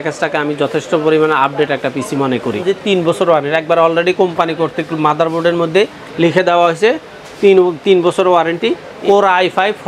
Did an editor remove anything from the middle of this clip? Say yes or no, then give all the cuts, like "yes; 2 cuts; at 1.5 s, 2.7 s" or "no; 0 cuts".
yes; 2 cuts; at 2.6 s, 8.9 s